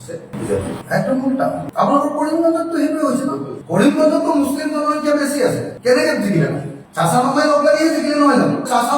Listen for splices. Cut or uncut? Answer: uncut